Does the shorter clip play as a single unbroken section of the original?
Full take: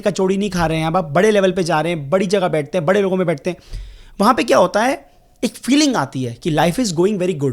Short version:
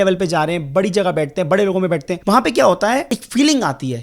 no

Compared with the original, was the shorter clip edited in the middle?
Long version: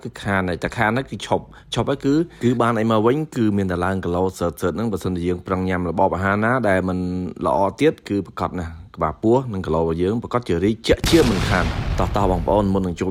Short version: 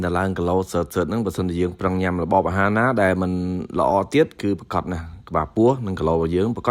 no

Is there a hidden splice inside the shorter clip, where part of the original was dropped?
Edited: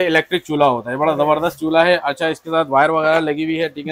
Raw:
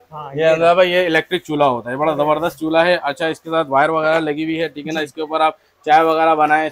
no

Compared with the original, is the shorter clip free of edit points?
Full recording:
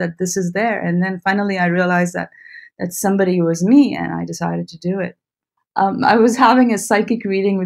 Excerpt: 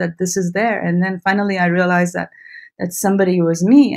yes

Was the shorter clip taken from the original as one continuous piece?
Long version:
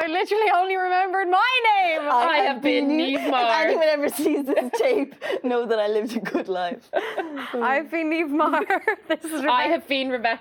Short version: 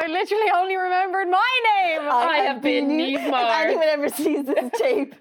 yes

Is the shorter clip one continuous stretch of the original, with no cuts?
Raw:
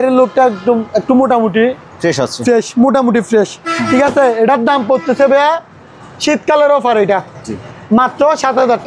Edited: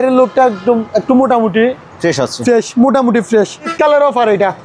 no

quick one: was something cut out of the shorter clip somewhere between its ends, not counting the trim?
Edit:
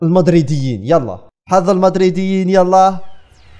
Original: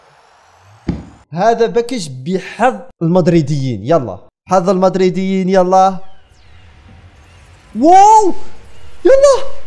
no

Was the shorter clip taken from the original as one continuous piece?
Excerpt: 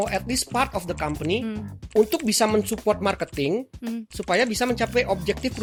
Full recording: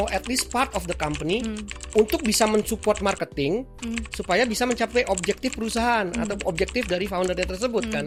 yes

